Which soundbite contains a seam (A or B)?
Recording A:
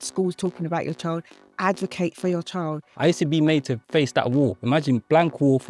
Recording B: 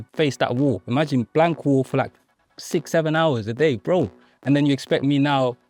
A